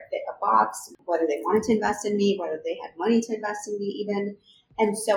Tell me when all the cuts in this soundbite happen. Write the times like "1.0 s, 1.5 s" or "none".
0.9 s